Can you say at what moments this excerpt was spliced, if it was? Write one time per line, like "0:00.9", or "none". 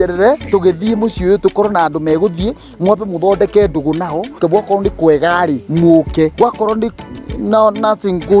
0:04.4
0:05.6
0:06.3